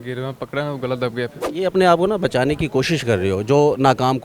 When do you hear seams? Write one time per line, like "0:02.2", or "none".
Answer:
0:01.4